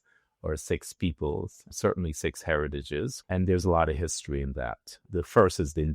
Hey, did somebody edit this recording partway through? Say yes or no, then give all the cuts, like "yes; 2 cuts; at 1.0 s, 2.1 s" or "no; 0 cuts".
yes; 1 cut; at 3.2 s